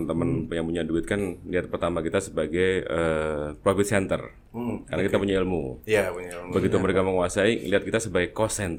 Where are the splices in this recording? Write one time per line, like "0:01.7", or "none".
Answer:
none